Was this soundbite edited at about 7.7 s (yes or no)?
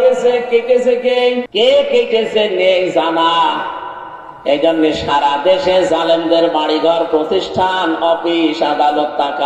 no